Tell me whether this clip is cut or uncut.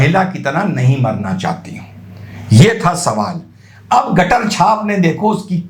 uncut